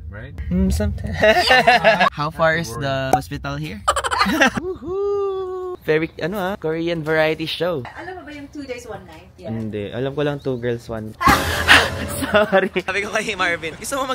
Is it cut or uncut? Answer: cut